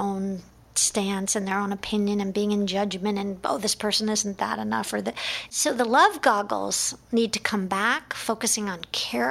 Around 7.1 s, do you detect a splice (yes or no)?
no